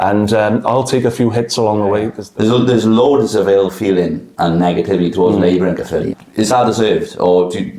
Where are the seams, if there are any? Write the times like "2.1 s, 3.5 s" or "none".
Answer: 2.2 s, 6.2 s